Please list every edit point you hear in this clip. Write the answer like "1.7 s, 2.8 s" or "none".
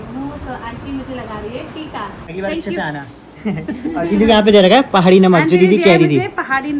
2.2 s